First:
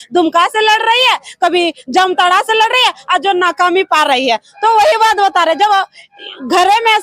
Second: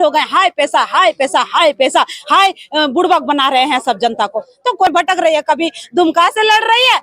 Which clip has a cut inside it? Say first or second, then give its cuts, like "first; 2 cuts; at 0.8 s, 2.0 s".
second; 1 cut; at 4.9 s